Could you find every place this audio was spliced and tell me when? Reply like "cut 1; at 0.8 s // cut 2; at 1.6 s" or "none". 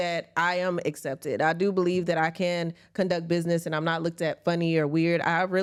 none

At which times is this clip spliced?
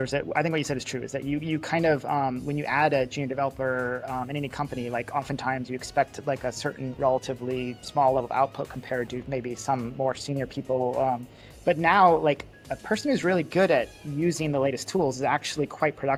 none

